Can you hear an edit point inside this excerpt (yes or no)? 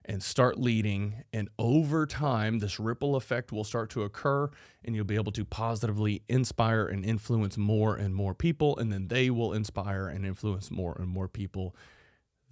no